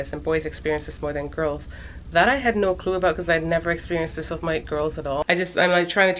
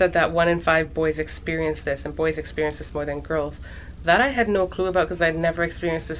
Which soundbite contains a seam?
first; 1 cut; at 5.2 s

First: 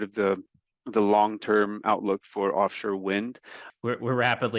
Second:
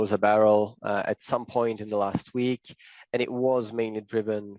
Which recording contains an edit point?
first; 1 cut; at 3.6 s

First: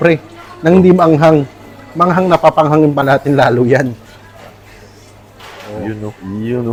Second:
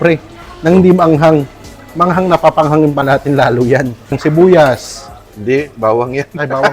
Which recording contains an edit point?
second; 1 cut; at 4.2 s

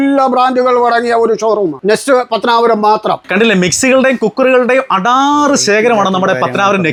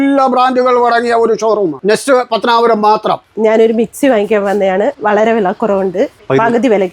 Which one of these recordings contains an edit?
second; 2 cuts; at 3.2 s, 5.0 s

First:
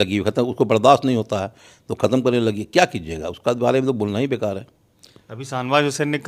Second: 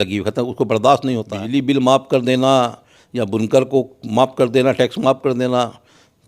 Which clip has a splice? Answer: second; 1 cut; at 1.3 s

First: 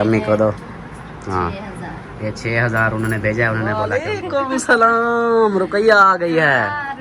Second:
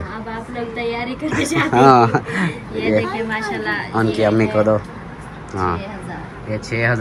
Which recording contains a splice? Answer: first; 1 cut; at 4.0 s

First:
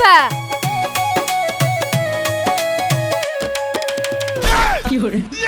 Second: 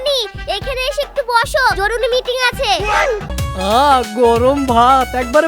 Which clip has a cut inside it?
second; 1 cut; at 3.4 s

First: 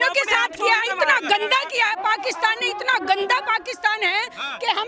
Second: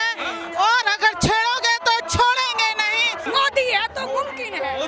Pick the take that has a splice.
second; 1 cut; at 3.2 s

